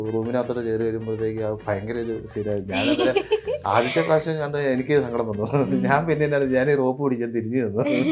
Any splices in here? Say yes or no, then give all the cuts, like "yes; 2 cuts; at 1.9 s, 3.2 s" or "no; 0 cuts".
no; 0 cuts